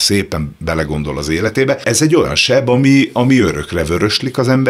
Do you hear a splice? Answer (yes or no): yes